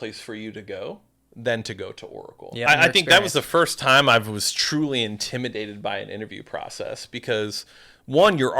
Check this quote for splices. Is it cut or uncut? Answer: cut